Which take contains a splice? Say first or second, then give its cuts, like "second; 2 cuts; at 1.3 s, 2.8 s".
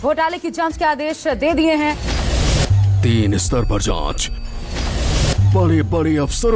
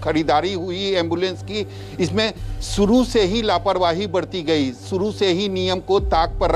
first; 1 cut; at 1.8 s